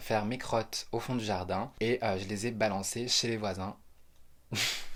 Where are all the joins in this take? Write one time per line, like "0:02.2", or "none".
none

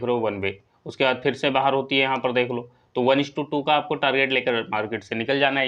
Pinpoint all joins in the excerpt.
none

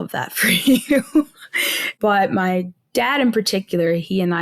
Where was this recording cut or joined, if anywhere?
0:01.8

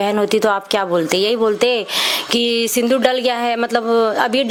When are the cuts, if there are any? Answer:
none

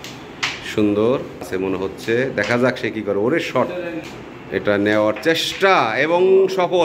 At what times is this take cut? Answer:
0:01.5
0:04.1

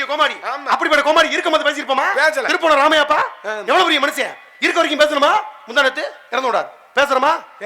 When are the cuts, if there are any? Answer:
0:02.5

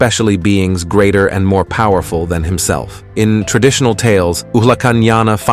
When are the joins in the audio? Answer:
none

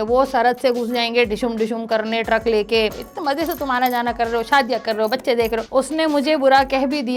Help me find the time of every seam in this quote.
0:02.9
0:05.6

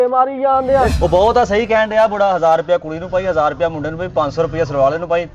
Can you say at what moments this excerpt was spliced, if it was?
0:00.9

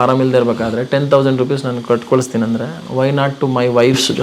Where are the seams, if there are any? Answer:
none

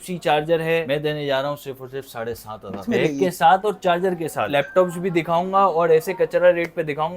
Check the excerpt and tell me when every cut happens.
0:00.9
0:02.8
0:04.5

